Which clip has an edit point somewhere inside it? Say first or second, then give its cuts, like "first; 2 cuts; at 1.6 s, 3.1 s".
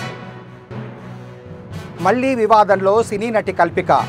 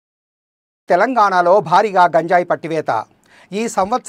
first; 1 cut; at 1.3 s